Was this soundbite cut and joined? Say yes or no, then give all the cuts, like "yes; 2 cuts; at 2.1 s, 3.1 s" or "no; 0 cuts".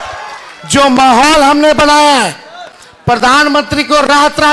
no; 0 cuts